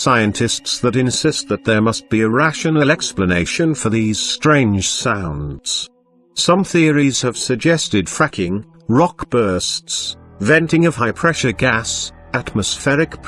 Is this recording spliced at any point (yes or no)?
yes